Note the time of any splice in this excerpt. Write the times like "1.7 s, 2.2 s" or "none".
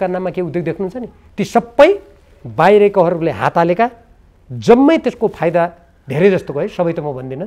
none